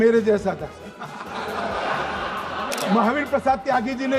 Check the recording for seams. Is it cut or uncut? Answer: cut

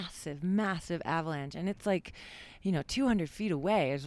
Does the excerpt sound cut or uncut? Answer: uncut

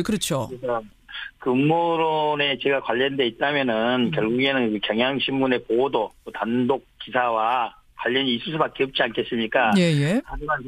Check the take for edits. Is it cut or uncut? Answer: uncut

